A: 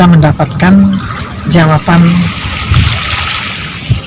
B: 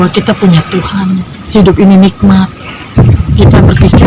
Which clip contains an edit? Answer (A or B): B